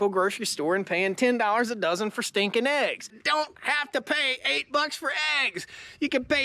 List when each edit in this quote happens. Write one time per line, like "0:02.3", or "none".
0:03.2